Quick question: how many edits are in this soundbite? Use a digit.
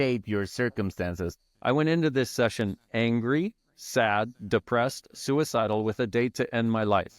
1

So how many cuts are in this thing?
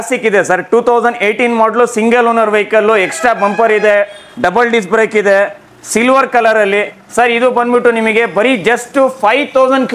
0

